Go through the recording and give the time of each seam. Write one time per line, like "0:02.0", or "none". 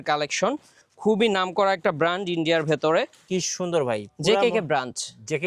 0:03.2